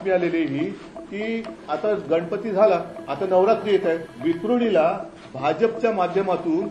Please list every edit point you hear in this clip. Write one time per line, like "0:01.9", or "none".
0:03.0
0:04.1